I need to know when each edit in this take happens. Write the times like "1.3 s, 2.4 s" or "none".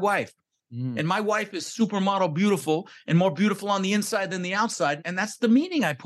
5.0 s